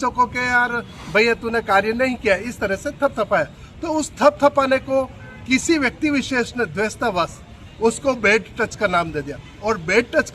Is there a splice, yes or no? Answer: no